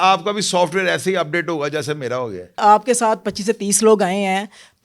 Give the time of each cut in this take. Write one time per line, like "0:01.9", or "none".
0:02.6